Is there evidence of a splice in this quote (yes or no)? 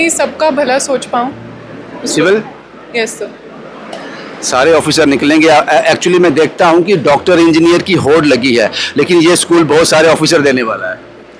no